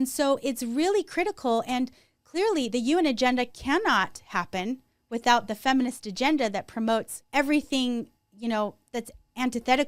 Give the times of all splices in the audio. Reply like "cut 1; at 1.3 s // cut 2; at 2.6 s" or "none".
cut 1; at 7.2 s

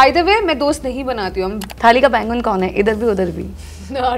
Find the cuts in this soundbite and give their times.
cut 1; at 1.6 s

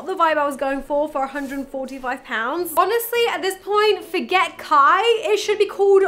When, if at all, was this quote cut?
cut 1; at 2.7 s

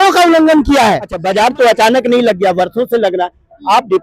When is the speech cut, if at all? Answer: cut 1; at 1.1 s

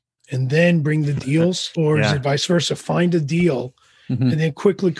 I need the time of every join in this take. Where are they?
cut 1; at 1.7 s

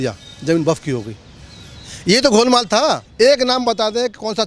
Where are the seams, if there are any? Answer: cut 1; at 3.1 s

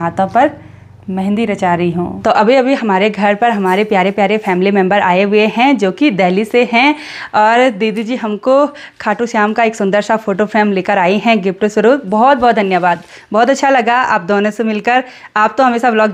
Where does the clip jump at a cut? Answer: none

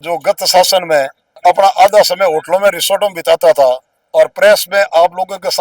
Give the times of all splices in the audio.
cut 1; at 1.2 s

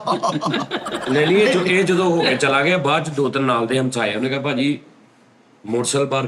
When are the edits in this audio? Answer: cut 1; at 1.0 s

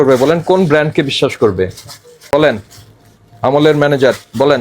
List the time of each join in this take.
cut 1; at 2.3 s

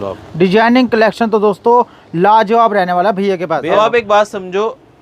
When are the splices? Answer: cut 1; at 3.7 s

